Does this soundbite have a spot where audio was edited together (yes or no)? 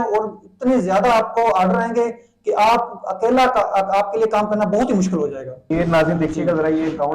yes